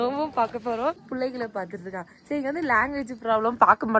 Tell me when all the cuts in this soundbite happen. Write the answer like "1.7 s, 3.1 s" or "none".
1.1 s